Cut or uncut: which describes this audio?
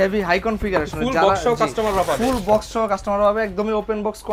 uncut